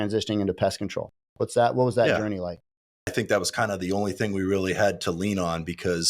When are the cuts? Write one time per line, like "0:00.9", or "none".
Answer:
0:03.1